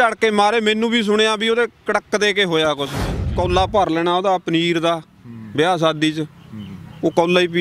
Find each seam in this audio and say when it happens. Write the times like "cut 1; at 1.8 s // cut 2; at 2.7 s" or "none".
cut 1; at 3.3 s